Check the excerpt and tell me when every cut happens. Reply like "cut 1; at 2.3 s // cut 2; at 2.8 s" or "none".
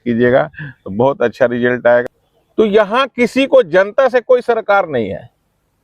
cut 1; at 2.0 s